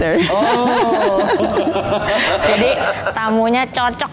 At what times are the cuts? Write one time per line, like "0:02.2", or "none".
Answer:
none